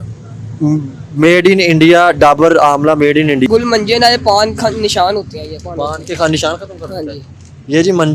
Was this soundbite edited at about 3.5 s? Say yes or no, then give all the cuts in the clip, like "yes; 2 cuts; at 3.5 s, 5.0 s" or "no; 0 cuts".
yes; 1 cut; at 3.5 s